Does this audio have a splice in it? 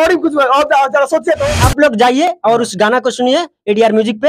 yes; 1 cut; at 1.6 s

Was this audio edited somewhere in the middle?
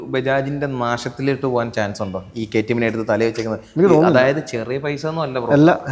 no; 0 cuts

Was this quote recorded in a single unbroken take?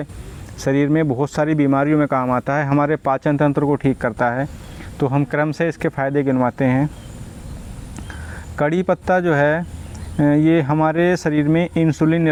yes; 0 cuts

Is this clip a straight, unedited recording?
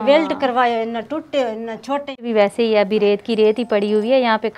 no; 1 cut; at 2.3 s

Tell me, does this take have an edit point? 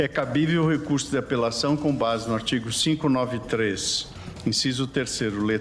no; 0 cuts

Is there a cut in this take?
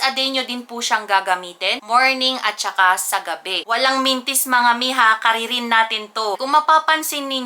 no; 0 cuts

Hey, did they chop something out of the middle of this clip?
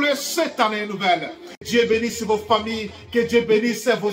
yes; 1 cut; at 1.6 s

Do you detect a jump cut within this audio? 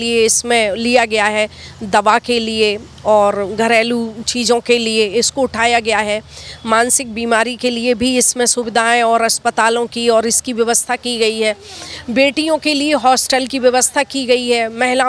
no; 0 cuts

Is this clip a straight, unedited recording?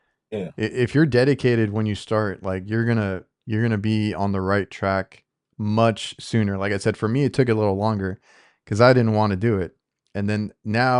yes; 0 cuts

